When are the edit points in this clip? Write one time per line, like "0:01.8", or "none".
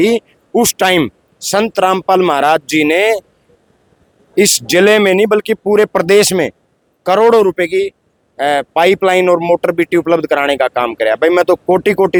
none

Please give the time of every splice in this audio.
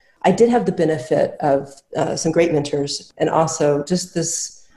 0:03.0

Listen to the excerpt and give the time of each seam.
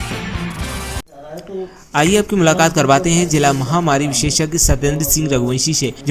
0:01.0

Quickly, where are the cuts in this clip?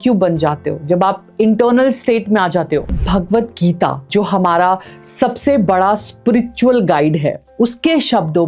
0:02.9
0:04.0

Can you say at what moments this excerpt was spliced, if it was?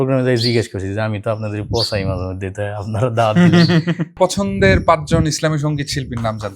0:04.1

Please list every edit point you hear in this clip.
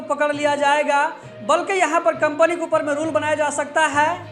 none

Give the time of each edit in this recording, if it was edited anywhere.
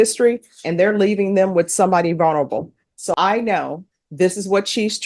0:03.0

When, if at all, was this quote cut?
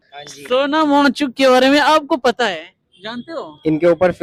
none

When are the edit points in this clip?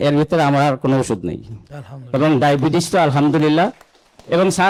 none

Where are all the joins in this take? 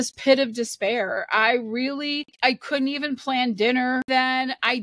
0:02.3
0:04.1

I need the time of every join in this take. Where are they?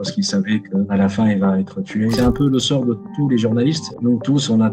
0:00.9
0:02.1

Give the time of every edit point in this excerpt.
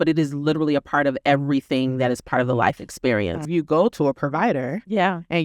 0:03.5

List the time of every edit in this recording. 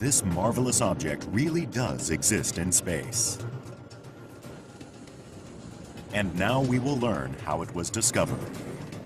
0:02.0

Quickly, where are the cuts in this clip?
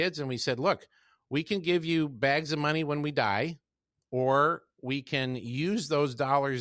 none

